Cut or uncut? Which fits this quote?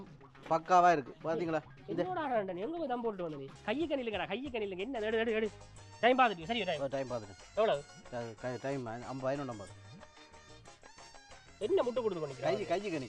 cut